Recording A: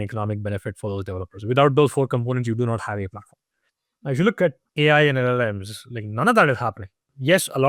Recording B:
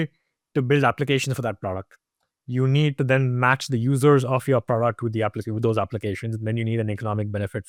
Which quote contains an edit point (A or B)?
A